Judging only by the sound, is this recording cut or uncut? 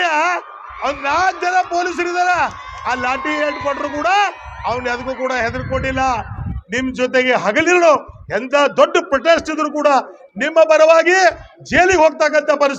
cut